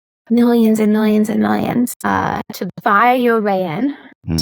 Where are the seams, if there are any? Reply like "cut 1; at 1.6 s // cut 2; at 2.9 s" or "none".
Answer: cut 1; at 2.1 s